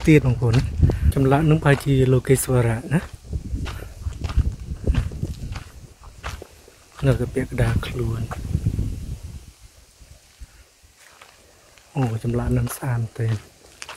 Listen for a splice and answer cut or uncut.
cut